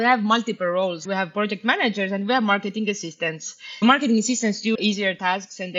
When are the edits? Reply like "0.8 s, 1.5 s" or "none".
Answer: 1.0 s, 3.8 s, 4.8 s